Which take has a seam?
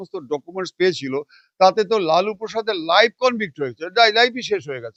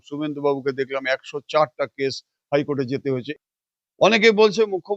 second; 1 cut; at 3.3 s

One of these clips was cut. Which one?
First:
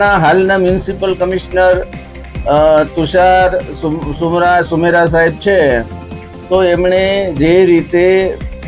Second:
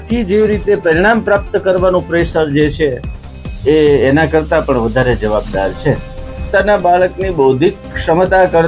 second; 1 cut; at 6.5 s

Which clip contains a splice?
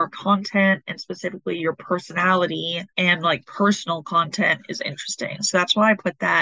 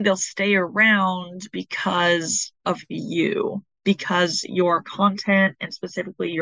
first; 1 cut; at 2.8 s

